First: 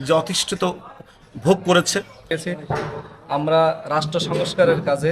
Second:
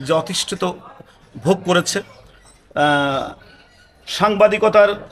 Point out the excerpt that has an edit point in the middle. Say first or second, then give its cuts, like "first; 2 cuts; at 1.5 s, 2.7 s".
first; 1 cut; at 2.3 s